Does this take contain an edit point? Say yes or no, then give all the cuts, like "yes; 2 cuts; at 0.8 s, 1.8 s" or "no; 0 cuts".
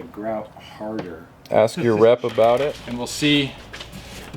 yes; 1 cut; at 2.8 s